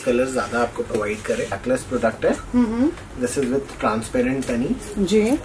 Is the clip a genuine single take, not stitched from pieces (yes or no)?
no